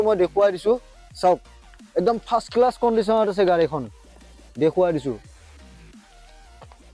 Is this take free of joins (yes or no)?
no